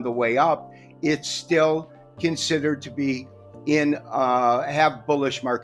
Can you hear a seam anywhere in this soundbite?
no; 0 cuts

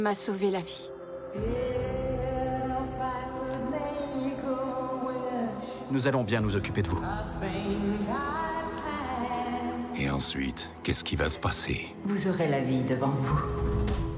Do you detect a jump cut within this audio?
yes; 1 cut; at 3.1 s

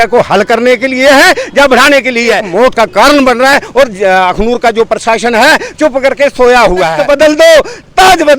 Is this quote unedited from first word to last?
no; 2 cuts; at 2.5 s, 6.9 s

